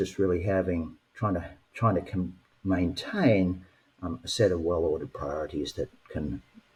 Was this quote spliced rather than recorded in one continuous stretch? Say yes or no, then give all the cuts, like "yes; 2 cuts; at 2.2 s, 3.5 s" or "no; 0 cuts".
no; 0 cuts